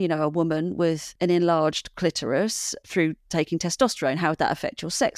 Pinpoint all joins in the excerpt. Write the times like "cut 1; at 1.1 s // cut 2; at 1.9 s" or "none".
cut 1; at 1.1 s